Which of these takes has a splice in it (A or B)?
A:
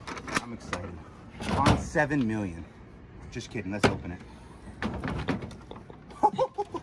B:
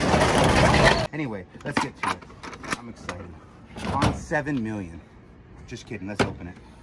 B